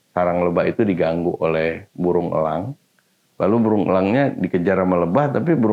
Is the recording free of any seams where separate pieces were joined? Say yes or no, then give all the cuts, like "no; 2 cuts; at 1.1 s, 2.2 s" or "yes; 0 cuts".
yes; 0 cuts